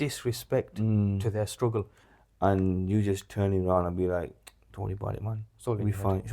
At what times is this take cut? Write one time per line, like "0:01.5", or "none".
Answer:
0:02.0